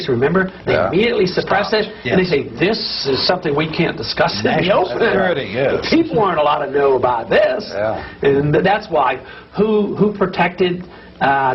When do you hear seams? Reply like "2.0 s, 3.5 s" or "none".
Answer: none

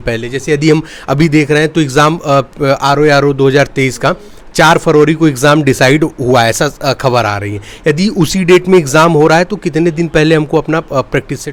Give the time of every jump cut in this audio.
none

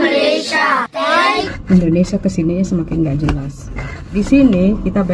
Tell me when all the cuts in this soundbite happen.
1.5 s, 3.9 s

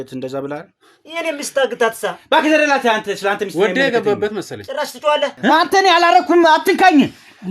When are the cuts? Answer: 5.4 s

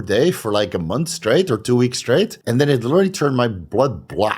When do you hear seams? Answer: 2.4 s

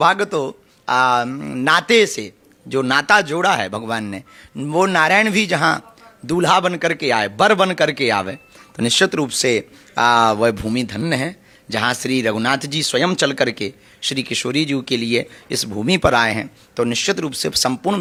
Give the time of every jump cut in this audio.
none

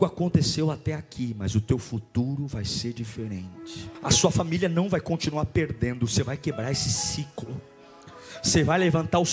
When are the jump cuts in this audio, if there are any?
3.9 s

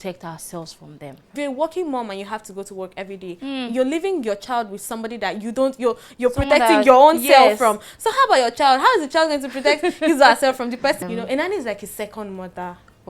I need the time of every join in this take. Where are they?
1.3 s, 11.0 s

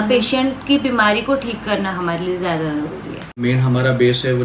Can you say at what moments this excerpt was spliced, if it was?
3.4 s

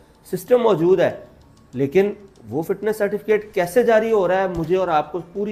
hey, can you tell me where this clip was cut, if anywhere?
none

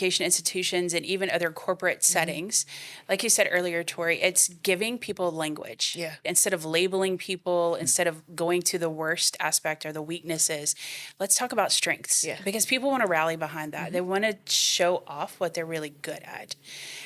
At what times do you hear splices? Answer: 6.3 s

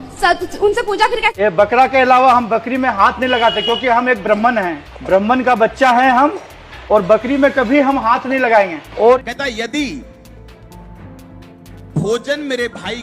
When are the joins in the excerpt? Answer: 1.3 s, 9.2 s

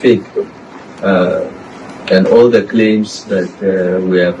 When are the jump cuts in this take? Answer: none

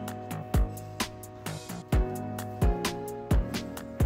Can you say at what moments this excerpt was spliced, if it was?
none

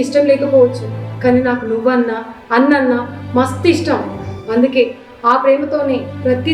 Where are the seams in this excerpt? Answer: none

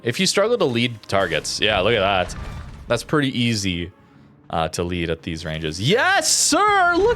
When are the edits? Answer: 2.7 s

